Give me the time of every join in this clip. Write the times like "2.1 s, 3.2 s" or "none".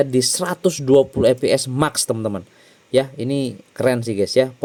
none